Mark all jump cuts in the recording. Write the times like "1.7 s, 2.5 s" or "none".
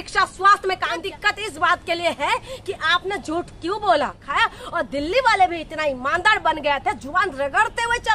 1.0 s, 4.2 s